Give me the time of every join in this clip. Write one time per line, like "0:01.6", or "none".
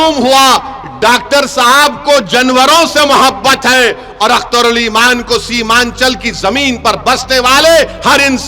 none